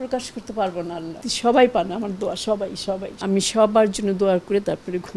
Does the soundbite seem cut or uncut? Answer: cut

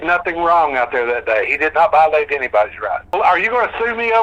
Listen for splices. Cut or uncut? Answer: cut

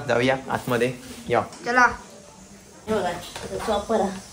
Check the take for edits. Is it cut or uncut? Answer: cut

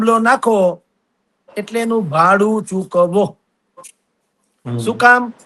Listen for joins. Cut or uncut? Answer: uncut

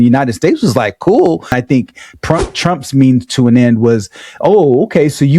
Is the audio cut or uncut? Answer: cut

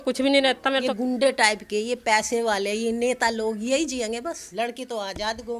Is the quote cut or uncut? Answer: cut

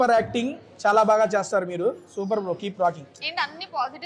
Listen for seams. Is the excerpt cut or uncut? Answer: uncut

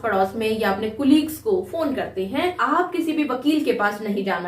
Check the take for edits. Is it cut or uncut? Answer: cut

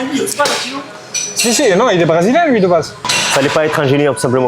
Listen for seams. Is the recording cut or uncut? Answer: cut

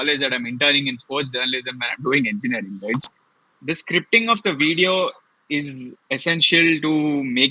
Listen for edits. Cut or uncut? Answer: cut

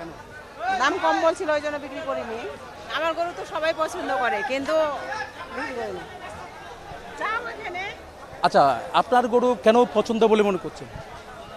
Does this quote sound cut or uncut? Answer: uncut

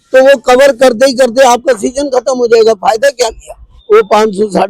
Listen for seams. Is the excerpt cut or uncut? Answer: cut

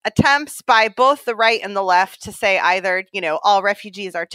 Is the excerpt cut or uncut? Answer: uncut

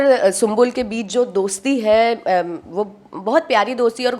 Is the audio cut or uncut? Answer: uncut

